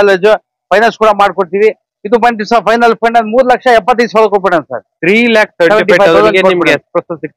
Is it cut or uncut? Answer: uncut